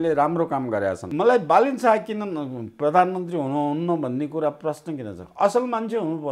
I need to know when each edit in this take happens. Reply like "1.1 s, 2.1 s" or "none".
1.0 s